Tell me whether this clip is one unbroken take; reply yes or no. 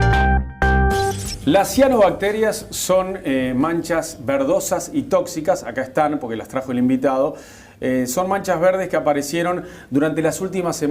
no